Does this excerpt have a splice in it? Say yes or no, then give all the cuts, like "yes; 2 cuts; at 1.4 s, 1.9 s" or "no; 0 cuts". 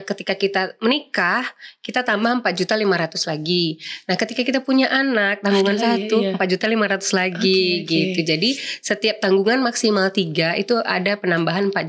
no; 0 cuts